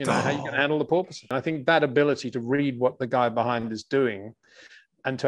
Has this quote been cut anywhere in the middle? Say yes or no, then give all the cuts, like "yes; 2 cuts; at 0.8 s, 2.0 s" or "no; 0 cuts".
yes; 1 cut; at 1.4 s